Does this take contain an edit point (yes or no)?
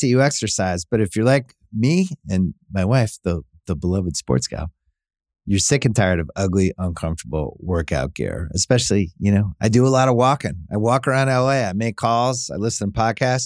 no